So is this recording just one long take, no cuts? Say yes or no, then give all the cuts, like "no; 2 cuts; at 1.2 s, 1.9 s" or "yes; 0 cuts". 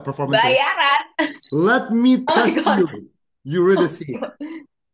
no; 1 cut; at 1.4 s